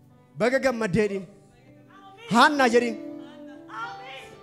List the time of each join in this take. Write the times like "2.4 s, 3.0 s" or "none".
none

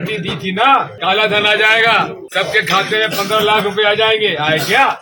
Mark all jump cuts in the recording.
0.9 s, 2.2 s

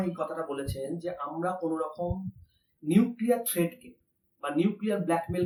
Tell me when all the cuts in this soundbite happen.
none

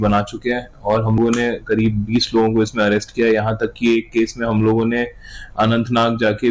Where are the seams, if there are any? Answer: 1.2 s

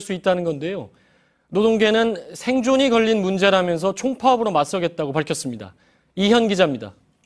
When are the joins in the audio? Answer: none

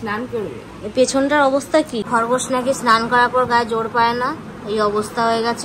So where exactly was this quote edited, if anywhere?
2.1 s

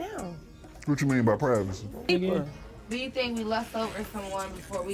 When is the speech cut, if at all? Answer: 2.1 s

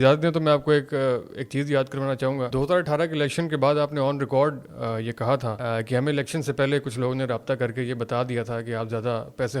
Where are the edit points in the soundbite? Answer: 2.5 s, 5.5 s

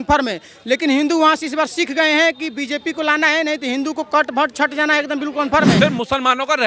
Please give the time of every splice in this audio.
5.8 s

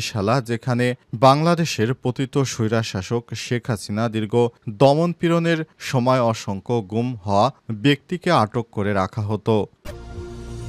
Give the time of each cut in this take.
9.7 s

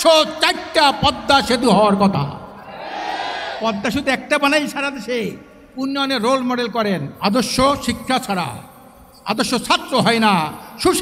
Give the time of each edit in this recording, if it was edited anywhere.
7.1 s

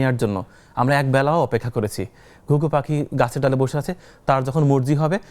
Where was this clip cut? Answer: none

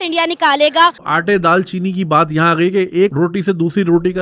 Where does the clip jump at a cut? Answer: 1.1 s

